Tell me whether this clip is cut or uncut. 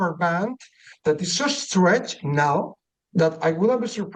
uncut